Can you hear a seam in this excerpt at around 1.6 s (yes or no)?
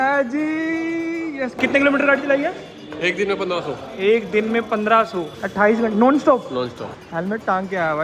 yes